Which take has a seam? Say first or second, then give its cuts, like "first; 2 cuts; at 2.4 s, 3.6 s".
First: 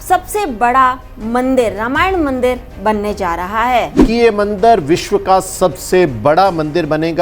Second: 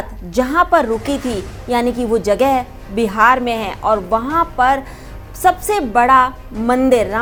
first; 1 cut; at 4.0 s